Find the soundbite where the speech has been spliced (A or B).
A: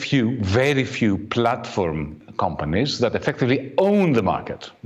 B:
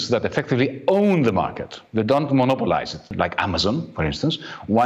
B